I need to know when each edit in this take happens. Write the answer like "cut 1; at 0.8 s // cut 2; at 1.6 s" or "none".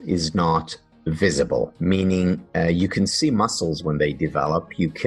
none